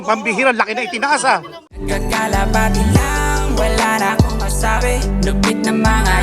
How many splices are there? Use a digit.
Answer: 1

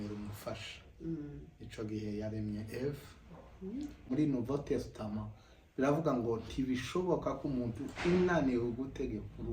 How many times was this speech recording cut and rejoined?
1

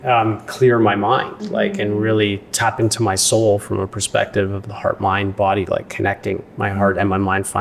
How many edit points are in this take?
0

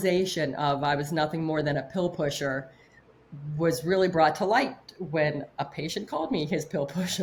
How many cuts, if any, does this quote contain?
0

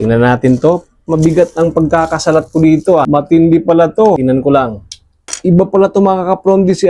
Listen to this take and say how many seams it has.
1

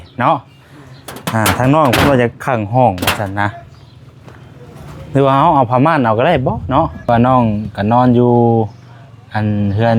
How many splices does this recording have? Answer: 1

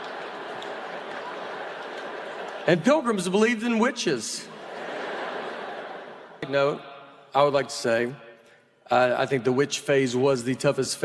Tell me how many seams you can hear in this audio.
1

